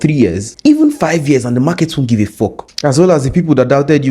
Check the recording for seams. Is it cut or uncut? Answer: uncut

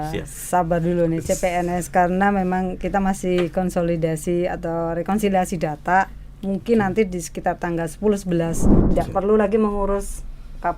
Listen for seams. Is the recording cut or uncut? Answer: cut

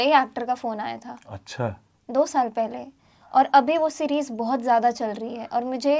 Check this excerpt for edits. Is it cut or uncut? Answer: uncut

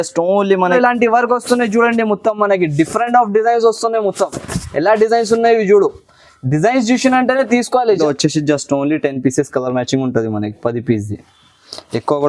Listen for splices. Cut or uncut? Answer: cut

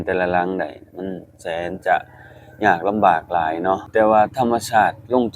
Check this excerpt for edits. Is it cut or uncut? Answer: cut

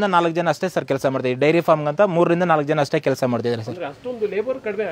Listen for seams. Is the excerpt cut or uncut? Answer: uncut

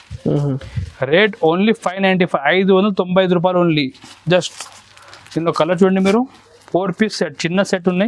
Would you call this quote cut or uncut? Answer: uncut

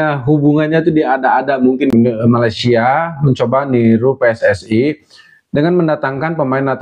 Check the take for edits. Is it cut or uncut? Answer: cut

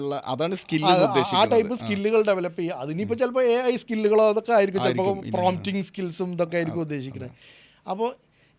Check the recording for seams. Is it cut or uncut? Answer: uncut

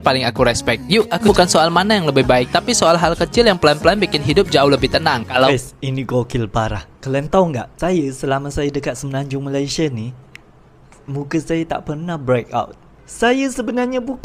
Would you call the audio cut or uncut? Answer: cut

